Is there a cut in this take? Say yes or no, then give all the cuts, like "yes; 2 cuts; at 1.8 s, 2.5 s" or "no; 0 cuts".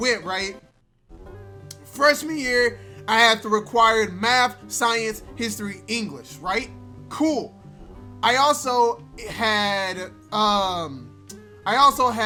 no; 0 cuts